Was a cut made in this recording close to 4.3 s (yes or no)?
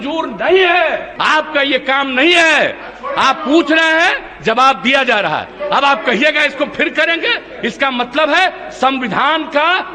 no